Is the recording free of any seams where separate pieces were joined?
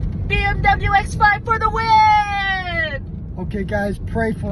yes; 0 cuts

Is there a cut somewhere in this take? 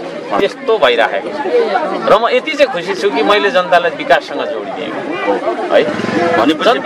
no; 0 cuts

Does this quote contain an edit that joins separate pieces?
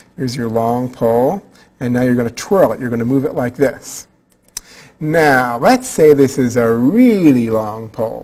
no; 0 cuts

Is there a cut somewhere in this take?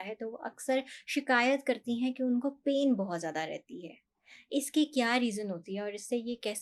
no; 0 cuts

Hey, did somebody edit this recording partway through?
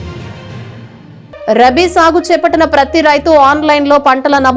yes; 1 cut; at 1.1 s

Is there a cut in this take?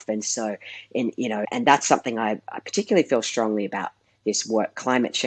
yes; 1 cut; at 1.5 s

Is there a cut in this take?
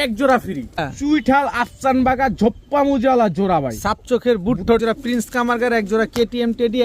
yes; 2 cuts; at 0.9 s, 4.8 s

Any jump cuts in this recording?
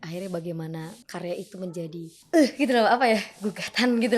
yes; 2 cuts; at 1.0 s, 2.2 s

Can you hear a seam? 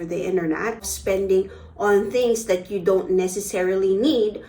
yes; 1 cut; at 0.9 s

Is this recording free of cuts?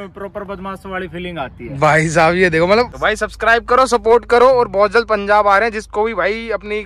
no; 1 cut; at 3.0 s

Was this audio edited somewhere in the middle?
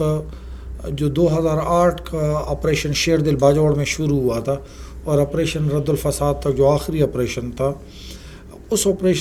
no; 0 cuts

